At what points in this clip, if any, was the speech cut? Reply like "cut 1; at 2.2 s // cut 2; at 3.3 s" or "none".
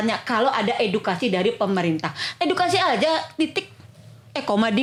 none